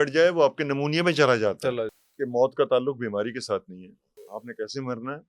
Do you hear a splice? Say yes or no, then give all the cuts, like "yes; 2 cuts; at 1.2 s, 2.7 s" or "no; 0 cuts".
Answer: yes; 2 cuts; at 1.9 s, 4.3 s